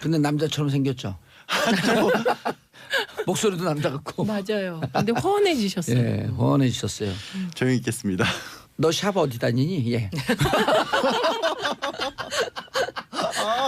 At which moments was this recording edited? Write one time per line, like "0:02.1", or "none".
none